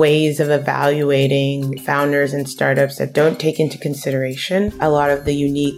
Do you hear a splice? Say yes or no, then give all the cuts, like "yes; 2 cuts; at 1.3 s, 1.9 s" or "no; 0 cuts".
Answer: yes; 2 cuts; at 1.8 s, 4.7 s